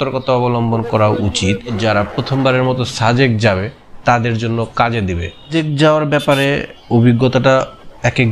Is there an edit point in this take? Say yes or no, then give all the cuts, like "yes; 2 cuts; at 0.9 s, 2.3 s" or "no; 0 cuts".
yes; 2 cuts; at 1.7 s, 5.5 s